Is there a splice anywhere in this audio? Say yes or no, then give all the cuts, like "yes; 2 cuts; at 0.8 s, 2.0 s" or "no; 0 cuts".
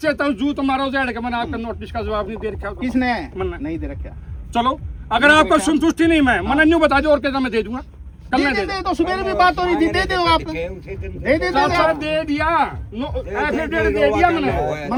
no; 0 cuts